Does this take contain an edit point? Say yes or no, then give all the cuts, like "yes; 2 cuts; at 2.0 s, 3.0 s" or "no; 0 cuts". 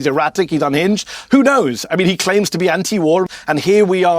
yes; 1 cut; at 3.2 s